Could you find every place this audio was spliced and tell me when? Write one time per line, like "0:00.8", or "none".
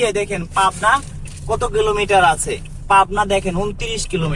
none